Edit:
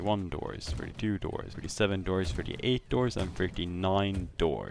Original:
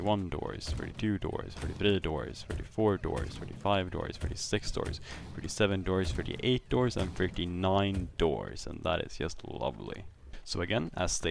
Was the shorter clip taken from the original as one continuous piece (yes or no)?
no